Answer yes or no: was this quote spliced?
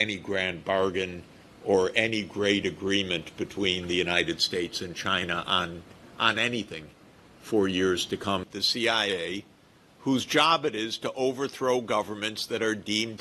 yes